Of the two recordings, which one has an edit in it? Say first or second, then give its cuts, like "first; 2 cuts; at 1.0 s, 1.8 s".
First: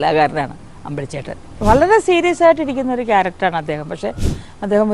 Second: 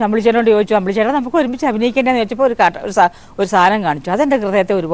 first; 1 cut; at 1.6 s